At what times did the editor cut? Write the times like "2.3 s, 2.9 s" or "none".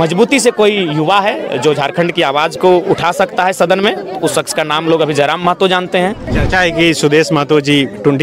6.3 s